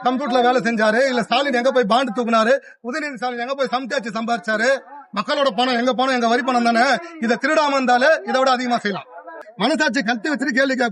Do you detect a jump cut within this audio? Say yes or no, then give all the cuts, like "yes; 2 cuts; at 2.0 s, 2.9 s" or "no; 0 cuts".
yes; 1 cut; at 9.3 s